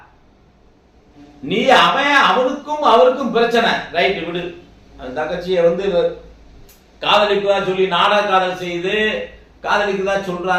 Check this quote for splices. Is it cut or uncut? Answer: uncut